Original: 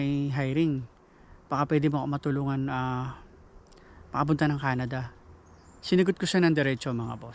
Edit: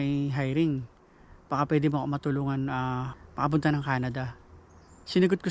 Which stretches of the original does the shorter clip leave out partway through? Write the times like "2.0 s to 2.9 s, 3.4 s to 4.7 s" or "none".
3.2 s to 3.9 s